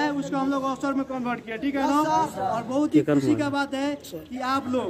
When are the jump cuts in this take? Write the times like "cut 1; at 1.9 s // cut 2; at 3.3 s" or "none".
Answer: none